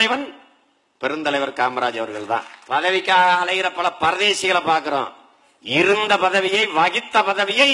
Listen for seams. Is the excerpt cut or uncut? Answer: cut